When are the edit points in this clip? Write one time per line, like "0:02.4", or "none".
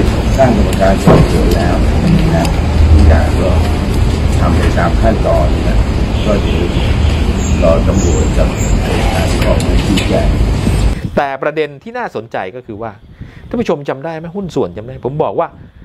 0:10.9